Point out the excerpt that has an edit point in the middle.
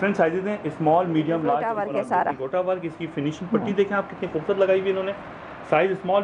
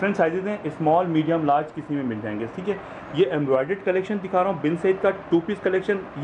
first; 1 cut; at 1.7 s

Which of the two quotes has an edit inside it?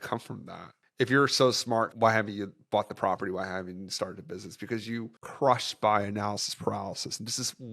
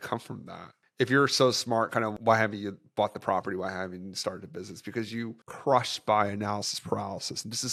first; 1 cut; at 1.9 s

